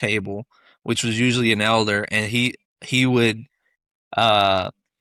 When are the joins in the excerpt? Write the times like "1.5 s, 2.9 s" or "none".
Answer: none